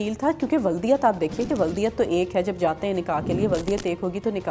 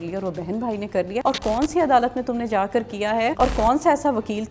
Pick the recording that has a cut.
second; 2 cuts; at 1.2 s, 3.3 s

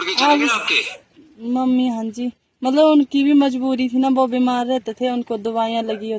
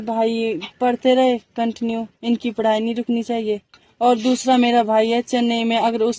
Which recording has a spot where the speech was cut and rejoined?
second; 1 cut; at 3.8 s

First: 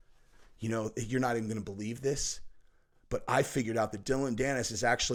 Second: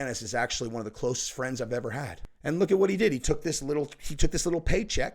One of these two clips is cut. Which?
second; 1 cut; at 2.2 s

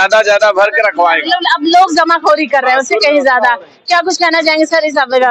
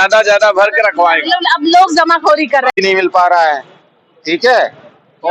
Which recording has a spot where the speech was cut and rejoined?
second; 1 cut; at 2.7 s

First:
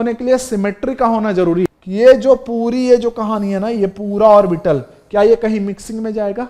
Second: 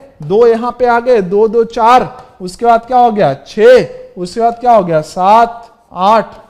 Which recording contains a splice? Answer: first; 1 cut; at 1.7 s

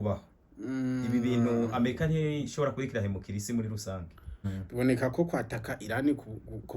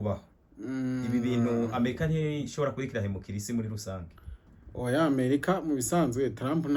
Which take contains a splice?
first; 1 cut; at 4.5 s

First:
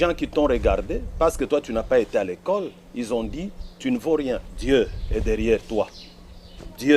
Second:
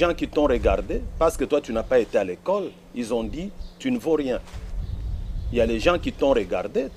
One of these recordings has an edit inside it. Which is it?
first; 1 cut; at 4.5 s

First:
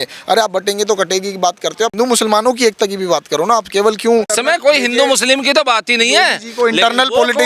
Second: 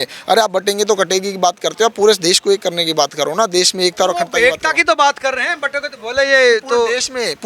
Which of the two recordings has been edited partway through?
first; 2 cuts; at 1.9 s, 4.3 s

